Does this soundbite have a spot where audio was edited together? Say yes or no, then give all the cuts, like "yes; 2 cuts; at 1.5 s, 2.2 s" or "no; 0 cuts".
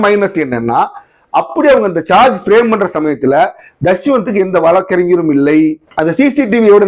yes; 1 cut; at 5.9 s